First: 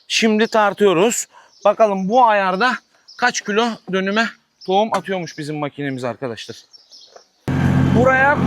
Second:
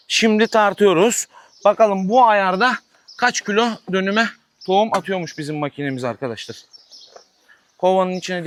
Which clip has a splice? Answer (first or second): first